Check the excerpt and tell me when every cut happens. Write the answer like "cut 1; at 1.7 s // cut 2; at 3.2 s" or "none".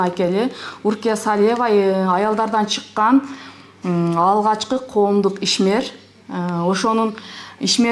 none